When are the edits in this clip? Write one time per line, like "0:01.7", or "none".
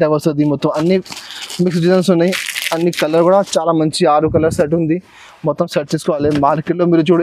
none